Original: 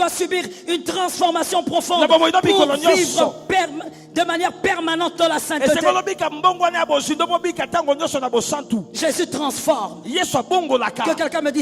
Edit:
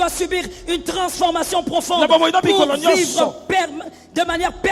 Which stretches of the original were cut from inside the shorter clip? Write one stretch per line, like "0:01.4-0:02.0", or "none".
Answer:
none

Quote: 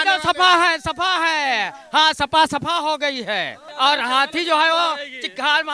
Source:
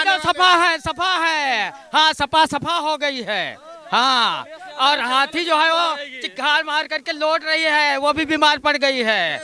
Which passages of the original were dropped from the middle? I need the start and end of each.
0:03.6-0:04.6

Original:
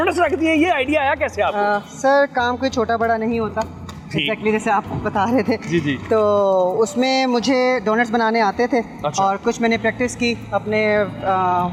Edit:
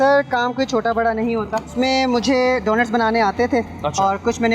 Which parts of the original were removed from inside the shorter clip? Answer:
0:03.8-0:06.9

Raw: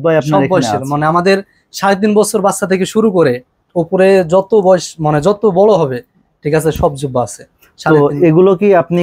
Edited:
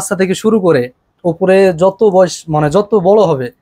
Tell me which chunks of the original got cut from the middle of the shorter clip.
none

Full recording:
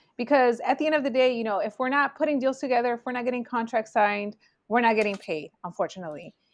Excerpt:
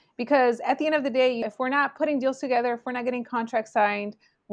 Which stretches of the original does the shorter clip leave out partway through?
0:01.4-0:01.6

